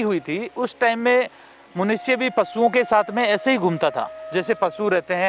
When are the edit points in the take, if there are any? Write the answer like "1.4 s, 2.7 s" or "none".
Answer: none